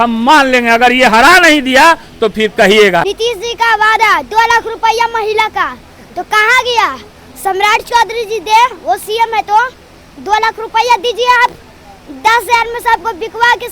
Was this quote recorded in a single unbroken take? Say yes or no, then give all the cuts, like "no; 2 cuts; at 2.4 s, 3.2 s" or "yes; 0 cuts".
no; 1 cut; at 3.0 s